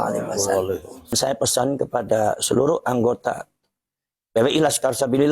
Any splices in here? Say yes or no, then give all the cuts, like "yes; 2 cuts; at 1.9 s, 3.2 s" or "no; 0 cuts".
yes; 1 cut; at 1.1 s